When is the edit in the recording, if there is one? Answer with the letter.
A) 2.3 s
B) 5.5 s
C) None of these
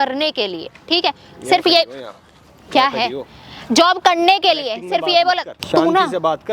B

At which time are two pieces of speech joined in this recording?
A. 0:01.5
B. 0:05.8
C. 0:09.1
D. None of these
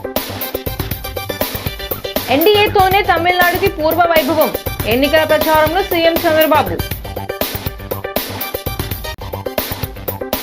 A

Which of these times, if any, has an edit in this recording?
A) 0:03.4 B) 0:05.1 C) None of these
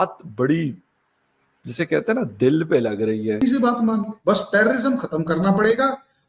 A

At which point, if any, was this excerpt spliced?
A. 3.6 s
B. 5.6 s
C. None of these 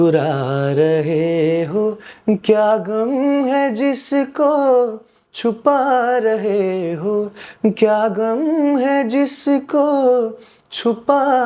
C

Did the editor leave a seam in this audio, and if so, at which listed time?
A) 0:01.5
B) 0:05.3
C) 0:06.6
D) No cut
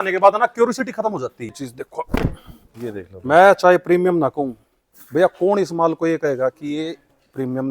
A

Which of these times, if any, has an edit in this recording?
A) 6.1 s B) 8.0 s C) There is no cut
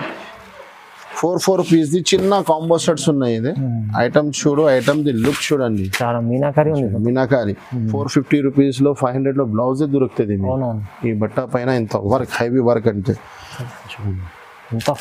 B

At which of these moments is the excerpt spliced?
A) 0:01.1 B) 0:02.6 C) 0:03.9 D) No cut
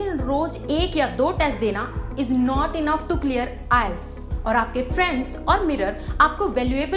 D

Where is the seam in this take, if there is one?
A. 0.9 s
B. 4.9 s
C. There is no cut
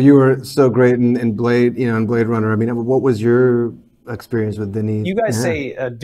B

